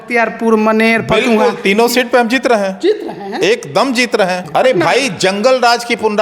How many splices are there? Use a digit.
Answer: 1